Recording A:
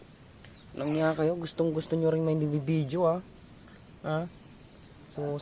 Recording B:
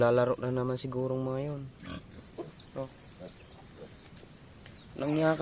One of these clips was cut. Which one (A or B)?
B